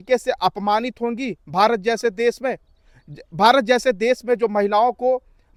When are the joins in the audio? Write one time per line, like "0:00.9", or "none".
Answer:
none